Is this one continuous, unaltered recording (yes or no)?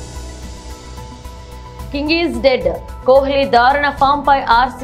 yes